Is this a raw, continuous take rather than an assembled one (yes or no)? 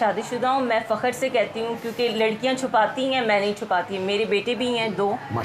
yes